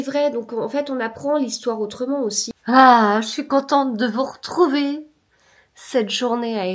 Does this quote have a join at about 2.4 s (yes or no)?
yes